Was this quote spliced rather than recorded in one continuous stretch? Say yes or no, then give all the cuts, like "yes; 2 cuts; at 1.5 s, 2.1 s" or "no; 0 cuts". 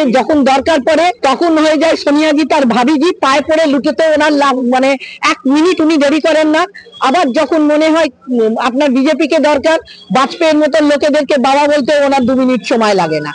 yes; 1 cut; at 1.2 s